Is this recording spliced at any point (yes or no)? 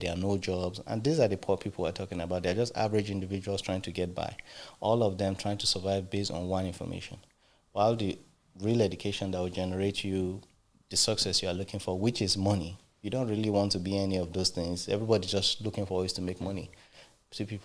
no